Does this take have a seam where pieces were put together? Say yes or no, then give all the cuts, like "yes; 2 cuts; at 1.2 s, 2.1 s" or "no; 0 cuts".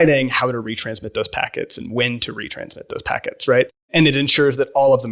no; 0 cuts